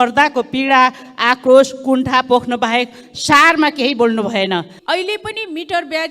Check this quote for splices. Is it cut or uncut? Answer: cut